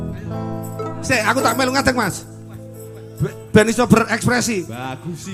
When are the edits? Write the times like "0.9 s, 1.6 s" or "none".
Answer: none

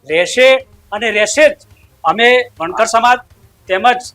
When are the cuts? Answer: none

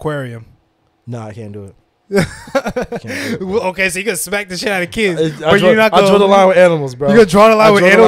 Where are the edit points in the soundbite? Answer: none

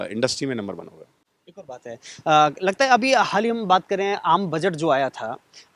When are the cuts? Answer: none

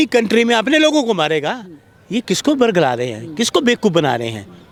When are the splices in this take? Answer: none

